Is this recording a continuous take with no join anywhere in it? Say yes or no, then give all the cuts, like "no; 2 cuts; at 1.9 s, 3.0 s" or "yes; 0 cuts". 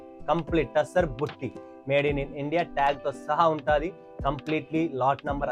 yes; 0 cuts